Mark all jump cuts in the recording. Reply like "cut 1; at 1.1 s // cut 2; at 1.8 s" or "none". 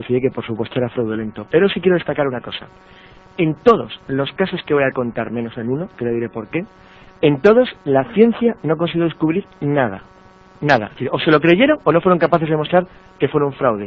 cut 1; at 10.2 s